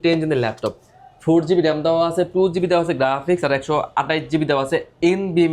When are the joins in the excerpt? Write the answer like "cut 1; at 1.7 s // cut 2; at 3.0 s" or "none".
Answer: none